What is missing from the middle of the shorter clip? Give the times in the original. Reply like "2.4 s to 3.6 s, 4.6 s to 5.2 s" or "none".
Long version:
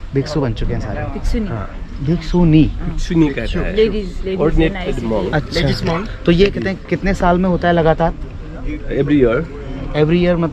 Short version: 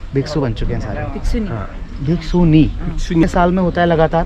3.2 s to 7.1 s